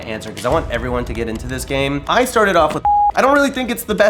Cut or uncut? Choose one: cut